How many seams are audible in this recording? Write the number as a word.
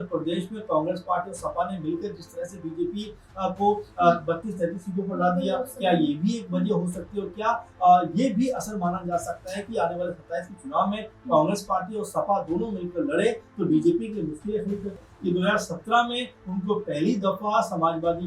one